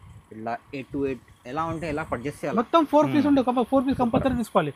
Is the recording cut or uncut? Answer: uncut